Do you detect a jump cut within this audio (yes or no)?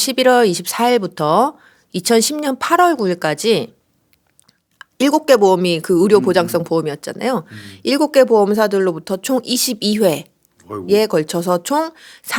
no